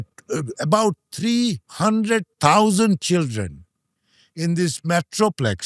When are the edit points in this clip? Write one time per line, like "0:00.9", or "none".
none